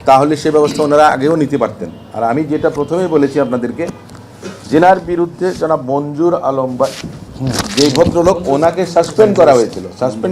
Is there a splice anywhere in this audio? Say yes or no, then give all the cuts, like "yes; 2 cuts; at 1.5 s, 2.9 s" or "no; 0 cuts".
no; 0 cuts